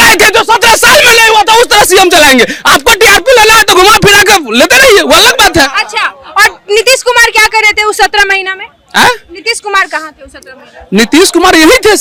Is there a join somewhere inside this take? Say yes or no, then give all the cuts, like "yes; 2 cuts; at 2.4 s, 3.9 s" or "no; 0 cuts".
no; 0 cuts